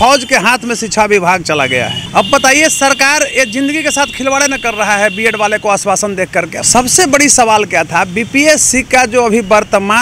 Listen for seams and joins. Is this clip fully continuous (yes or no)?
no